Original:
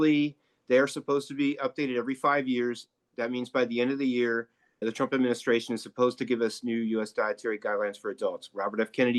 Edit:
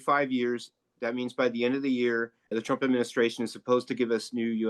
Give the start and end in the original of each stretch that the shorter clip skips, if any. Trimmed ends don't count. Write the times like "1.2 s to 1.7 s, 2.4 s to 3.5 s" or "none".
4.5 s to 4.7 s